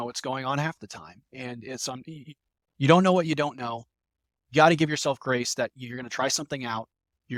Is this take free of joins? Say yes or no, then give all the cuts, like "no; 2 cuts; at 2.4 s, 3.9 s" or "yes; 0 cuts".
yes; 0 cuts